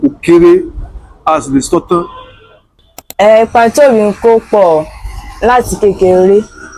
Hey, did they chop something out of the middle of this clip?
yes; 1 cut; at 3.0 s

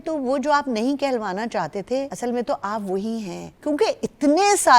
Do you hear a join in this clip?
yes; 2 cuts; at 2.1 s, 3.4 s

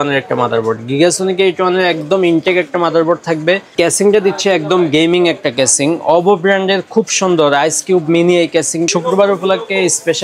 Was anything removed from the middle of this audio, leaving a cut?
yes; 2 cuts; at 3.7 s, 8.9 s

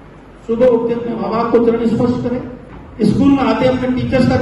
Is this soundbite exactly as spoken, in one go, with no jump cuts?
no; 1 cut; at 1.1 s

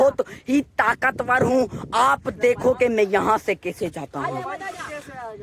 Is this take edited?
yes; 1 cut; at 3.5 s

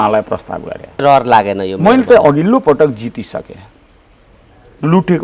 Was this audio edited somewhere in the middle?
yes; 1 cut; at 1.0 s

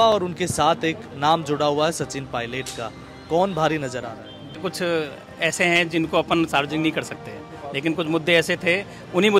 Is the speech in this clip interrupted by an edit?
yes; 1 cut; at 4.6 s

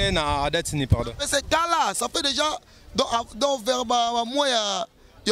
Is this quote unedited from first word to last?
yes; 0 cuts

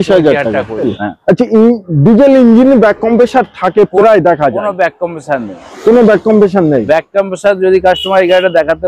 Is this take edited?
yes; 1 cut; at 1.0 s

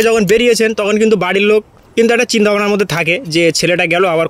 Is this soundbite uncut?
no; 1 cut; at 1.8 s

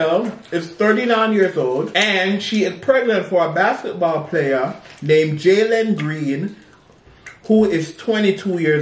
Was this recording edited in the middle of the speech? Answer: yes; 1 cut; at 1.9 s

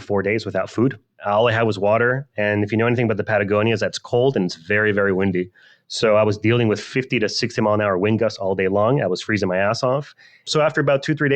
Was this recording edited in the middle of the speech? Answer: yes; 1 cut; at 10.5 s

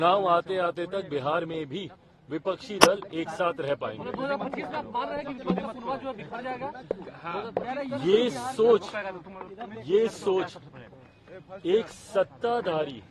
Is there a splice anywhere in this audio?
no; 0 cuts

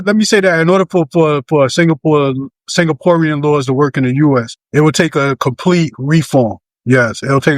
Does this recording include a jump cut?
yes; 2 cuts; at 4.6 s, 6.7 s

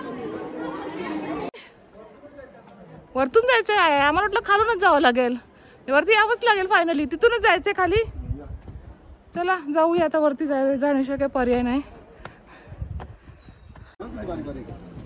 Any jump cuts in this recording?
yes; 2 cuts; at 1.5 s, 14.0 s

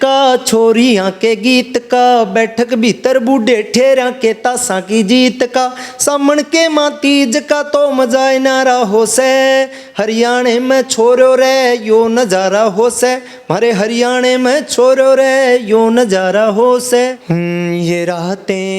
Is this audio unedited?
no; 1 cut; at 17.2 s

